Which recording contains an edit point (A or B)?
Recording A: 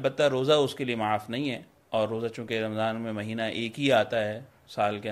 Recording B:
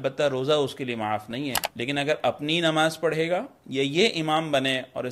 B